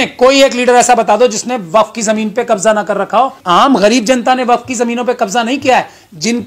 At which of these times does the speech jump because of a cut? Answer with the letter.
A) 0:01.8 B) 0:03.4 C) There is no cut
B